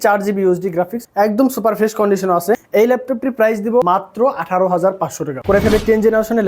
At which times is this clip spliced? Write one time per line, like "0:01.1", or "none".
0:01.0
0:02.6
0:03.8
0:05.4